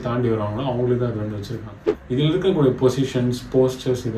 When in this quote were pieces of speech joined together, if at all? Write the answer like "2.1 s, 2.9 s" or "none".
1.5 s